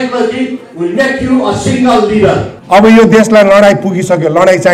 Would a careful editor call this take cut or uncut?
cut